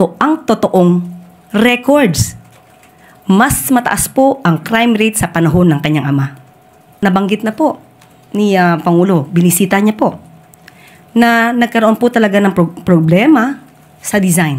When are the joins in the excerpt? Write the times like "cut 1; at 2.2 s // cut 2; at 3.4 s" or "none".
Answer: cut 1; at 7.0 s